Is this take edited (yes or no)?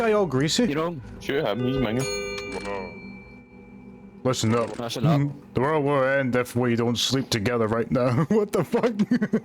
no